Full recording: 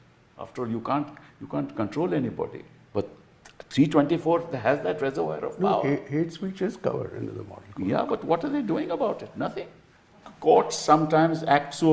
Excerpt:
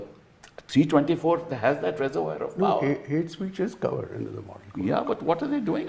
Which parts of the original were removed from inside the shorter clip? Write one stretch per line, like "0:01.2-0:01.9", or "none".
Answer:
none